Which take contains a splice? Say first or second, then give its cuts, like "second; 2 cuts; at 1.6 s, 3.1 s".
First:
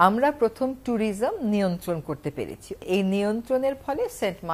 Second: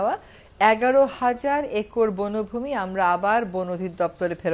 first; 1 cut; at 2.7 s